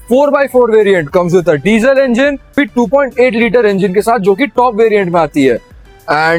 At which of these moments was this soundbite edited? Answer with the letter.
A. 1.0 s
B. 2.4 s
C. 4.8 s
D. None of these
D